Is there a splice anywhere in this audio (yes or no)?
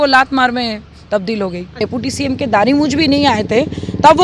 yes